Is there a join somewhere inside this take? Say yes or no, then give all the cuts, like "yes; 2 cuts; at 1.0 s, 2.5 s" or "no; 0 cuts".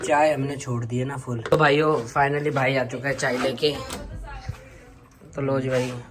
yes; 1 cut; at 1.5 s